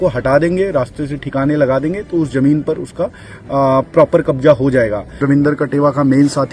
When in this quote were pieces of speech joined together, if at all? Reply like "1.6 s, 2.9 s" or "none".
5.2 s